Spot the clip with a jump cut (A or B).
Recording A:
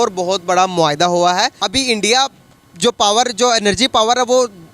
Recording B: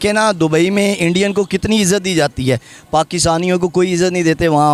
A